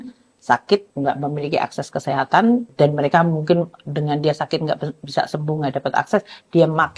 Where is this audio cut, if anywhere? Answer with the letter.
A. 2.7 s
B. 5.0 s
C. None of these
A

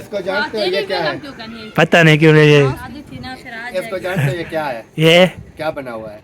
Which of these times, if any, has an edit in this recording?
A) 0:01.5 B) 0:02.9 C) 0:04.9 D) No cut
B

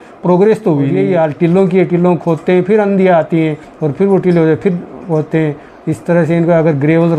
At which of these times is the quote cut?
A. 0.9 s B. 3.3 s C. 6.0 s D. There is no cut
A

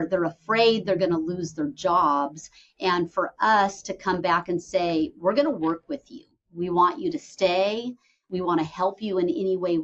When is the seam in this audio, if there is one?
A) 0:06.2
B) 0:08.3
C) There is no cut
B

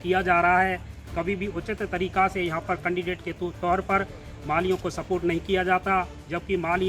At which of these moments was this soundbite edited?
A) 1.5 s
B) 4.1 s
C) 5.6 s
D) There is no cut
D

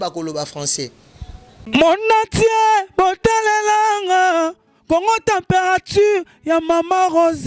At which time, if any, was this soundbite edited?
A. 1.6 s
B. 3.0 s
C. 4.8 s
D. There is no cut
A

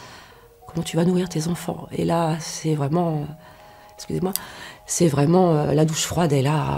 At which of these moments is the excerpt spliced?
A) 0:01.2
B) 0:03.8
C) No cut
C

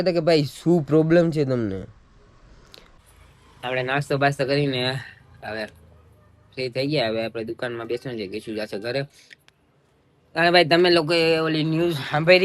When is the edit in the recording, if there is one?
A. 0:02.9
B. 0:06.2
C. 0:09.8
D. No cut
A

